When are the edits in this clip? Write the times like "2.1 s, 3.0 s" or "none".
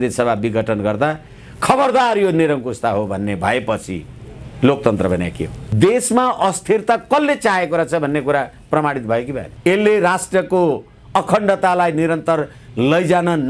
5.6 s, 9.4 s